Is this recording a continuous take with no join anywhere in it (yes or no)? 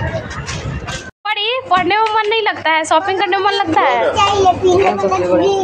no